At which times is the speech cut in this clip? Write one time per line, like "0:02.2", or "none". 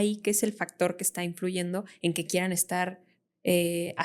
none